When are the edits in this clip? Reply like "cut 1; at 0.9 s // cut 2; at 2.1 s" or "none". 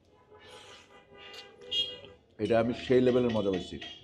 cut 1; at 2.1 s